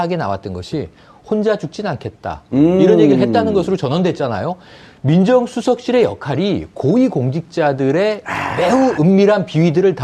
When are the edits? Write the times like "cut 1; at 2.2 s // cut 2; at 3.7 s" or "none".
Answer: cut 1; at 6.9 s

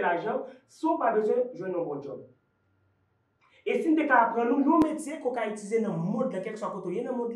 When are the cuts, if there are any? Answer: none

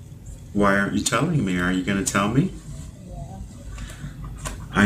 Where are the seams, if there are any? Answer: cut 1; at 2.7 s

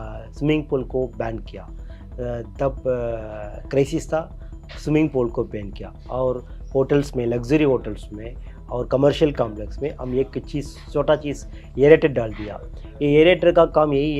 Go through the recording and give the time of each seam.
none

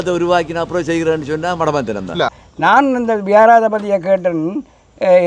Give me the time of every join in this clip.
cut 1; at 2.4 s

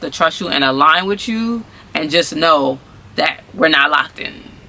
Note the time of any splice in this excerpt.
none

